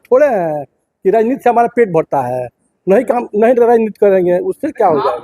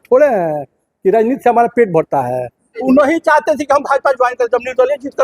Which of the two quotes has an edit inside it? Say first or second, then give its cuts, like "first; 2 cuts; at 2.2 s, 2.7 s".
second; 1 cut; at 2.8 s